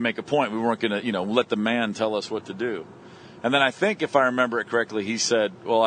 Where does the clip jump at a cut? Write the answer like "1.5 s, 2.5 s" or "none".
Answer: 2.8 s

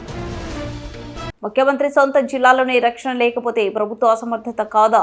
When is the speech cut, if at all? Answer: 1.3 s

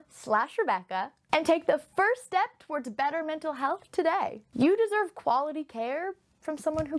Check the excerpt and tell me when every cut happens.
none

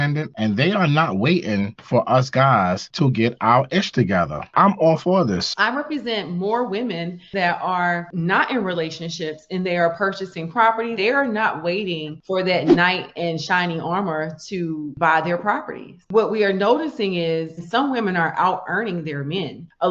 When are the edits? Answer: 4.4 s

